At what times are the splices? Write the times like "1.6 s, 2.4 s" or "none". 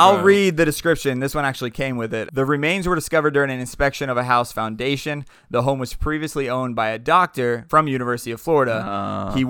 2.3 s, 7.6 s